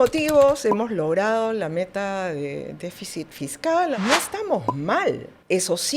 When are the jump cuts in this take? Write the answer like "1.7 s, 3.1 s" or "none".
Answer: 4.0 s